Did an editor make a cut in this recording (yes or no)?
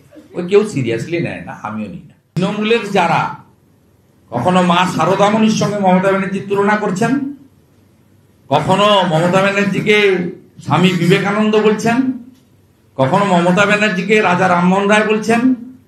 yes